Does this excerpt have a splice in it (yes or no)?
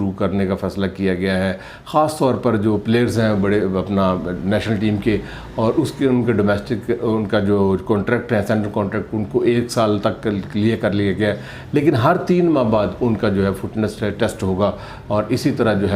no